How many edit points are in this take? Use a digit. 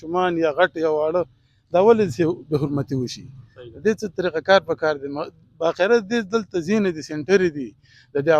0